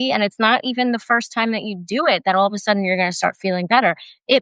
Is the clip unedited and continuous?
yes; 0 cuts

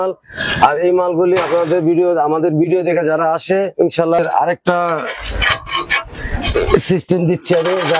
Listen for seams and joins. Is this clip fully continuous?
no; 1 cut; at 4.2 s

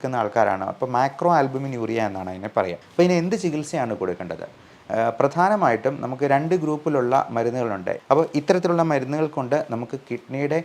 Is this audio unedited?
no; 2 cuts; at 2.8 s, 8.0 s

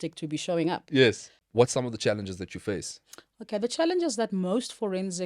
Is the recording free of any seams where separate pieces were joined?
no; 1 cut; at 1.4 s

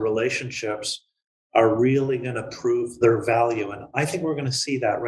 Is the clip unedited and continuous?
no; 1 cut; at 3.0 s

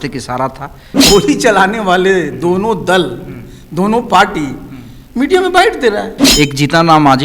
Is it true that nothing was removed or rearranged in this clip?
no; 2 cuts; at 1.0 s, 6.2 s

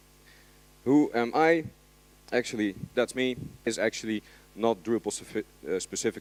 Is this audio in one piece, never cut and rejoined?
yes; 0 cuts

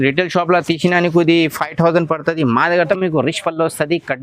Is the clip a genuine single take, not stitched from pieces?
no; 1 cut; at 2.9 s

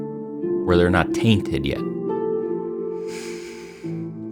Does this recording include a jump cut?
no; 0 cuts

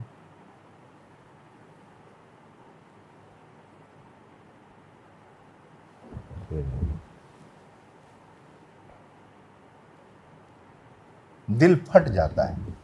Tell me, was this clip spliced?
yes; 1 cut; at 10.5 s

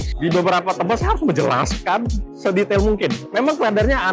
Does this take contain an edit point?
no; 0 cuts

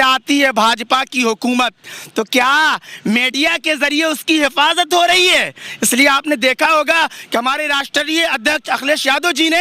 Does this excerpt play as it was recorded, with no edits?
yes; 0 cuts

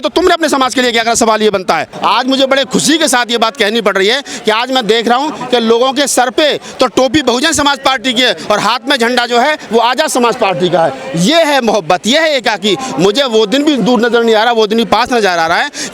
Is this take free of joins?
no; 1 cut; at 1.9 s

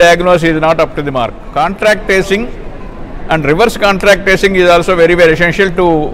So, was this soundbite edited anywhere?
yes; 1 cut; at 1.3 s

